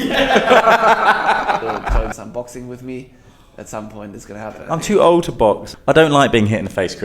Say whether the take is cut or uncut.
cut